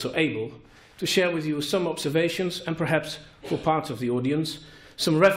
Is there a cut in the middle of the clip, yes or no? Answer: yes